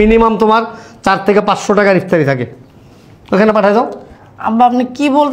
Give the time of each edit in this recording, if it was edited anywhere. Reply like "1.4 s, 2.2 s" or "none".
none